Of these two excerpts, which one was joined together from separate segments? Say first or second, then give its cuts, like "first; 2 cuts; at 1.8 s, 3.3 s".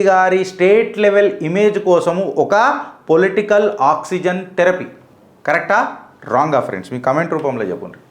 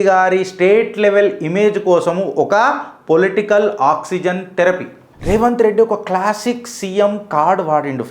second; 1 cut; at 5.1 s